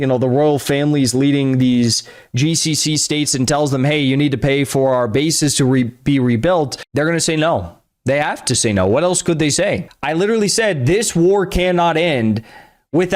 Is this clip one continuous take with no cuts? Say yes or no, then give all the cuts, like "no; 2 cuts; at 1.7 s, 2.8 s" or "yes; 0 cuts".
no; 1 cut; at 9.9 s